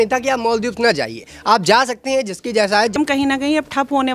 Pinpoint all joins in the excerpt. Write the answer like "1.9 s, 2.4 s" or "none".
3.0 s